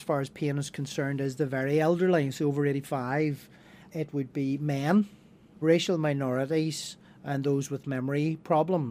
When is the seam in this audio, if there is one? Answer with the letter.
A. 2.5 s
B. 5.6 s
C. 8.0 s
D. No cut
B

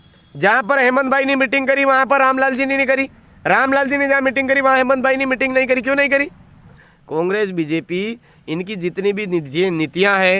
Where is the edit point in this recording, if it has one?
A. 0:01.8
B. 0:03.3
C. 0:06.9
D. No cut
C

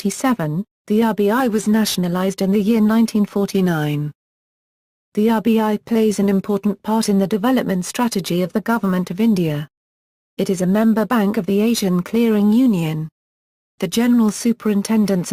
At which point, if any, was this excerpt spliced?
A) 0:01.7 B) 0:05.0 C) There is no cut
A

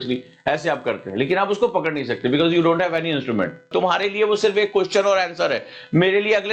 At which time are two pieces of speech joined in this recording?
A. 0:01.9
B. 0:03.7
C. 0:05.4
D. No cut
B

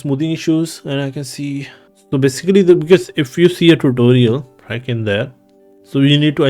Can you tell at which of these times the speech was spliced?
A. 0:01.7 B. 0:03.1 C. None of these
A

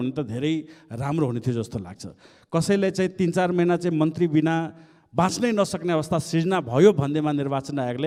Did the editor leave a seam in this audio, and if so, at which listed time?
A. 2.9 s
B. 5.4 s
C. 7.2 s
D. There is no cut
D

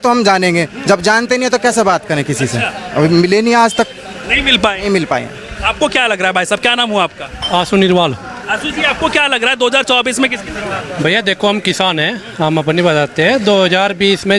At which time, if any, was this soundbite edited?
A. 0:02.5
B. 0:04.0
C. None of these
C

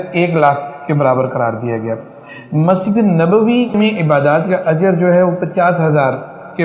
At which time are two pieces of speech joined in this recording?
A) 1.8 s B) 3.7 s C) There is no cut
B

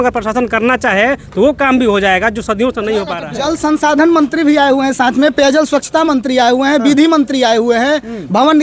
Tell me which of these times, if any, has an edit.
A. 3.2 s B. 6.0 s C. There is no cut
A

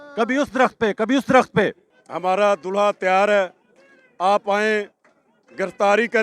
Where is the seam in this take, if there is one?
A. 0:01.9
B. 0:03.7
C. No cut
A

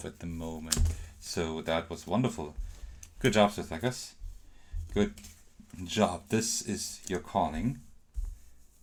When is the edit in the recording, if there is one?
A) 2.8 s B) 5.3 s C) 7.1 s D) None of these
D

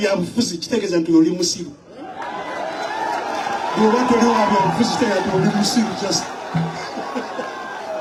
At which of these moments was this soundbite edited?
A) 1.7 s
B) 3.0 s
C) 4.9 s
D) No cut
D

